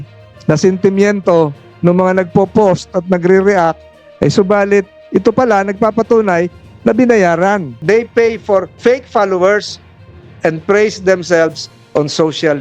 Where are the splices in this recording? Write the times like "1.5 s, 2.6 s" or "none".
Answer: 7.8 s